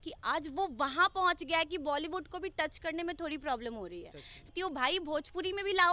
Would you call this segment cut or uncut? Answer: cut